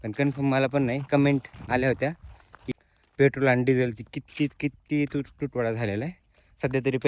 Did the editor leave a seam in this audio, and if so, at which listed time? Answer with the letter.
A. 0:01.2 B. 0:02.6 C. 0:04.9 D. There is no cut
B